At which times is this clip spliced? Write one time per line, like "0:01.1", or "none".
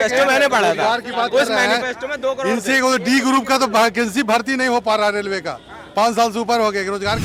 none